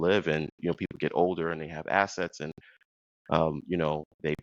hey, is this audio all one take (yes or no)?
yes